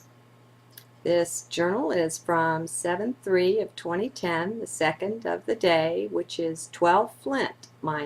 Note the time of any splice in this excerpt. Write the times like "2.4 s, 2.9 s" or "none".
5.5 s